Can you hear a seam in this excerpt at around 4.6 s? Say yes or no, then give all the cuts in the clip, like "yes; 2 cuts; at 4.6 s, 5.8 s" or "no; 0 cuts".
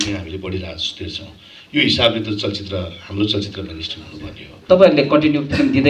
yes; 1 cut; at 4.6 s